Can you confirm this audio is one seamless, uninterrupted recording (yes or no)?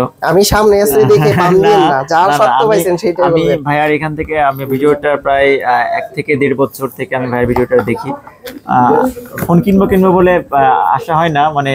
yes